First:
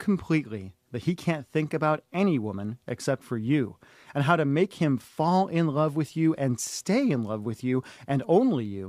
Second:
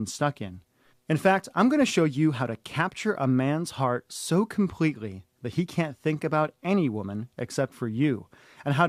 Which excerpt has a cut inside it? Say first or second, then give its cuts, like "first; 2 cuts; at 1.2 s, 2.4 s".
first; 1 cut; at 7.2 s